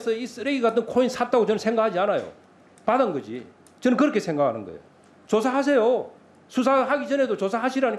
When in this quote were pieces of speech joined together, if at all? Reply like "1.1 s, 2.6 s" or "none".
none